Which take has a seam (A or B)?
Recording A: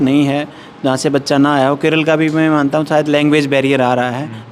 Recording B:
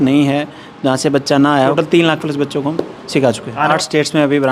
B